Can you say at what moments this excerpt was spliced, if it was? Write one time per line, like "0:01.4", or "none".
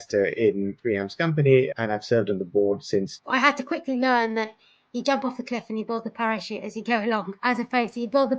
0:01.7
0:03.2
0:07.3